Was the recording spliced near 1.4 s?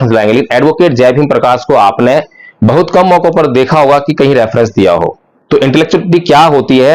no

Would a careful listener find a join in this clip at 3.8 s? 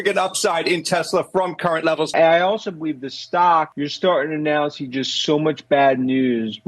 yes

